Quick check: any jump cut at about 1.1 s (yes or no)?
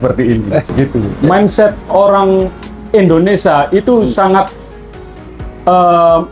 yes